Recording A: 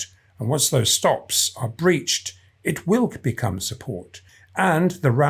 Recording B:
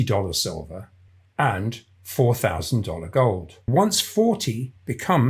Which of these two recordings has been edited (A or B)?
B